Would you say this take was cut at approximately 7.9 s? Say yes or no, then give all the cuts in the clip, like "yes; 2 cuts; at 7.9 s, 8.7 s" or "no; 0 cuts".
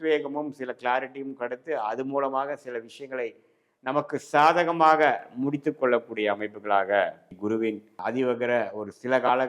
yes; 1 cut; at 7.9 s